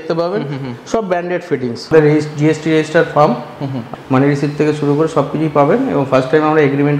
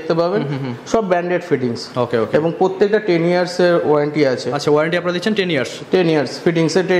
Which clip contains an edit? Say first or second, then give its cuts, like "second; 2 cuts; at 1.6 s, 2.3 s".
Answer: first; 2 cuts; at 1.9 s, 3.9 s